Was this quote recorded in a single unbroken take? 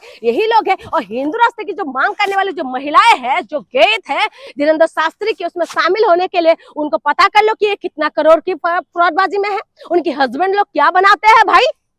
yes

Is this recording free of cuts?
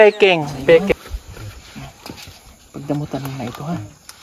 no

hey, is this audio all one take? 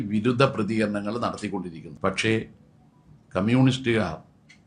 no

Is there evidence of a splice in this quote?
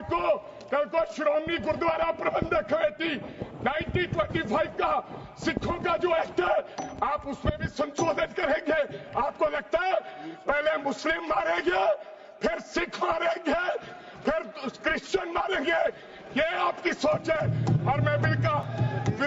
no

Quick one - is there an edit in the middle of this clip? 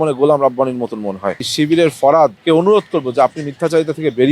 yes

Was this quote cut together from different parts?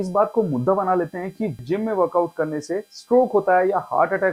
yes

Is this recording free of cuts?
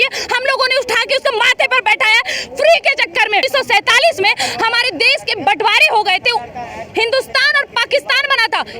no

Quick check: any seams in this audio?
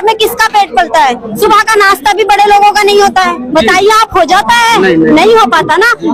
no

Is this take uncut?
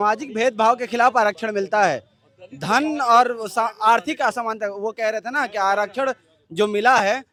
yes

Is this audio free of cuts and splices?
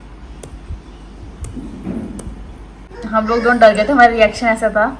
no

